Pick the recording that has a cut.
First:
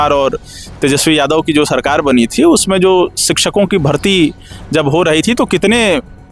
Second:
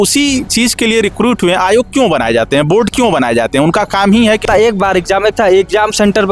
second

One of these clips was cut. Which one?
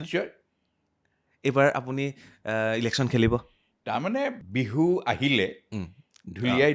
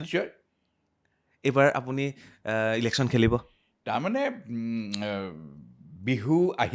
first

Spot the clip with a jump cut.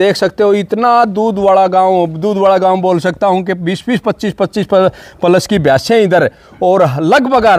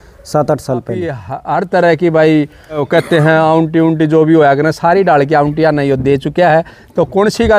second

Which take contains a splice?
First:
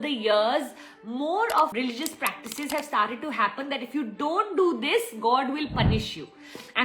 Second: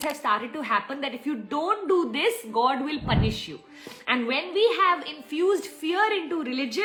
first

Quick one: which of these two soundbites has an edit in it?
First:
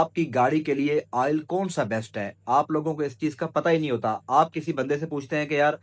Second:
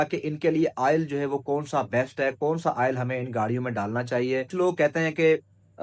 second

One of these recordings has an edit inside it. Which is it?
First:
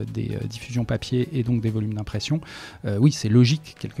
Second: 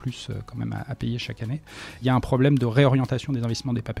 second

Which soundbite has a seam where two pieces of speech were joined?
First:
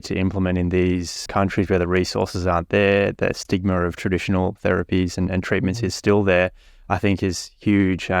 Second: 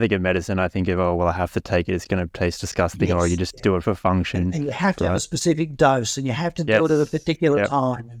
first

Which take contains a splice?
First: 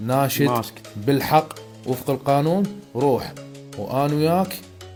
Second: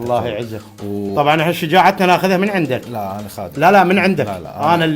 second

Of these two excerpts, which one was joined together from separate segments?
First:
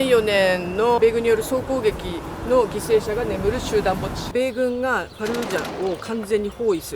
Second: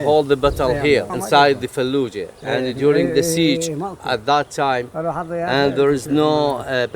first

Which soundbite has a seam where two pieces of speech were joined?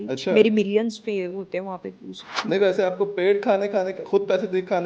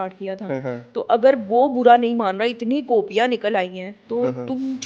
first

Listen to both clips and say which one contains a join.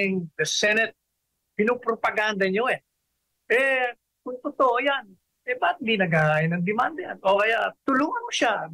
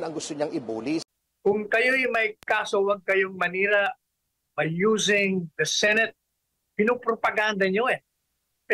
second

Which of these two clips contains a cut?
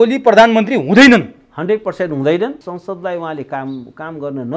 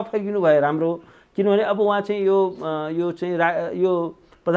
first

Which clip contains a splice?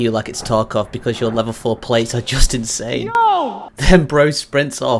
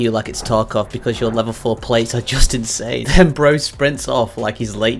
second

